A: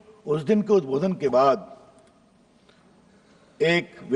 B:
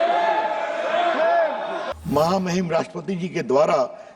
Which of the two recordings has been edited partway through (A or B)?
B